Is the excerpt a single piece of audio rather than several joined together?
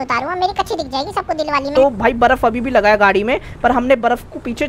no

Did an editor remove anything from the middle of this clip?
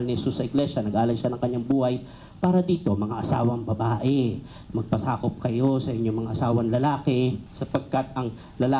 yes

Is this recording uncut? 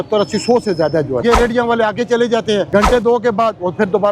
no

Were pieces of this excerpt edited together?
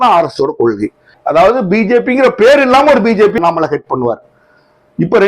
yes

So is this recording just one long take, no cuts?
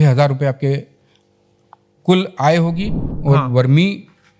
no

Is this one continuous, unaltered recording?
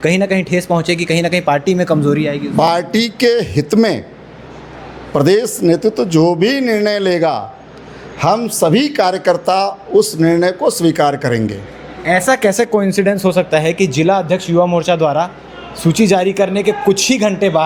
yes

